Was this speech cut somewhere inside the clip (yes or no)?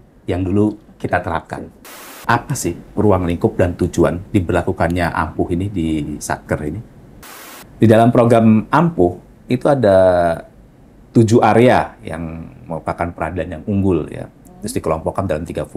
yes